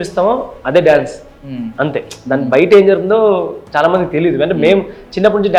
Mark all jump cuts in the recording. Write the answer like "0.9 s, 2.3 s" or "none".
none